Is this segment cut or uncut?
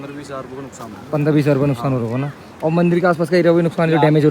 uncut